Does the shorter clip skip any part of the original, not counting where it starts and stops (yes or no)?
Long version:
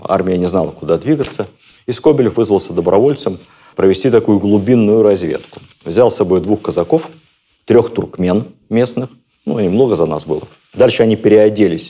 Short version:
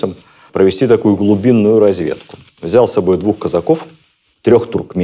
no